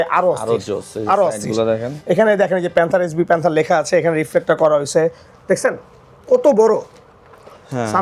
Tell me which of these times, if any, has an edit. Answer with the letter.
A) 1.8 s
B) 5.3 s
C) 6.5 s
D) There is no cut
B